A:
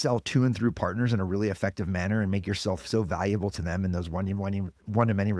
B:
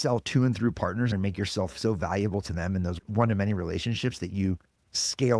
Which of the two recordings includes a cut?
B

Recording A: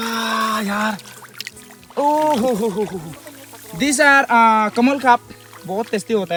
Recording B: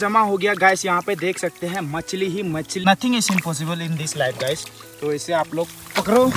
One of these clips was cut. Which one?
B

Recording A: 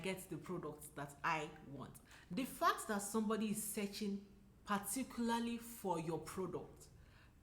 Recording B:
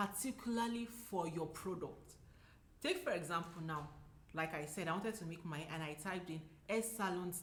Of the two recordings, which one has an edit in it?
A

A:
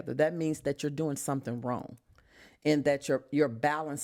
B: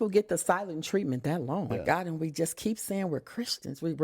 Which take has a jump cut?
B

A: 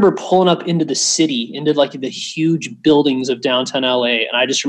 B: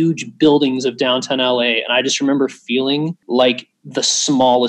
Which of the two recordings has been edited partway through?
B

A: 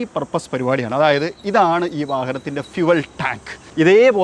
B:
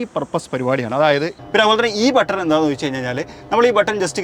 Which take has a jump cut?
B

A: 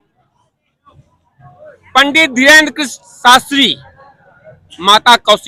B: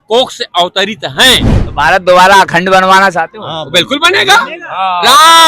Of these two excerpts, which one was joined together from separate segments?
B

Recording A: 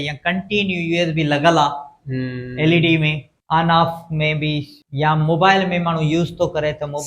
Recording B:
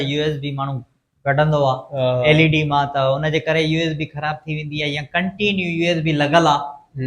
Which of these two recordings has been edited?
A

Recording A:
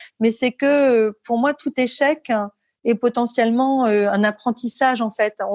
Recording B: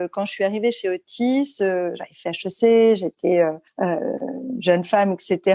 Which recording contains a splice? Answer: B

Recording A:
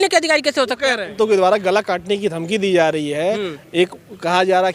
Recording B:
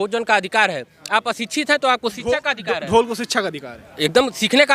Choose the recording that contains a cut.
A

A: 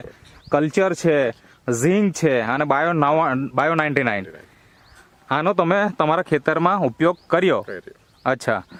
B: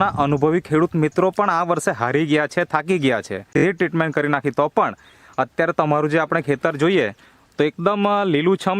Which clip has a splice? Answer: B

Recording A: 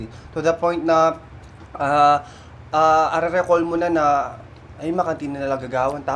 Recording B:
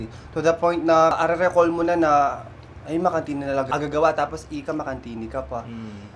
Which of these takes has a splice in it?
B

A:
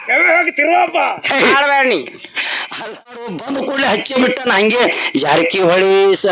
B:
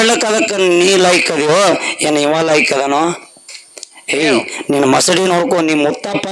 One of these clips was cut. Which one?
A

